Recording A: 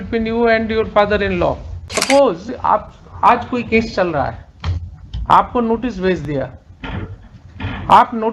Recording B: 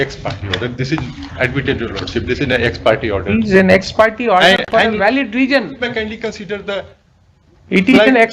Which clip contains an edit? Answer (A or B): A